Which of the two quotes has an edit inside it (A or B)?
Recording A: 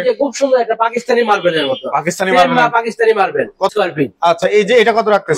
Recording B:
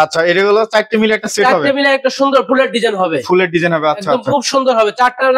A